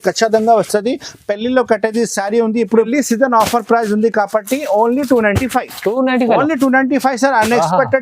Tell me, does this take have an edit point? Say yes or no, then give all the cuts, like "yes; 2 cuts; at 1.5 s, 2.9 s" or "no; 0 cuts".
yes; 1 cut; at 2.9 s